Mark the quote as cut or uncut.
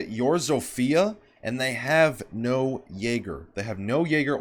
uncut